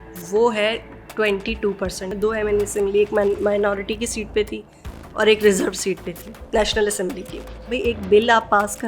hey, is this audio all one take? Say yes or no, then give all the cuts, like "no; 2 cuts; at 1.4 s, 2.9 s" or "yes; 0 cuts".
no; 2 cuts; at 2.1 s, 7.7 s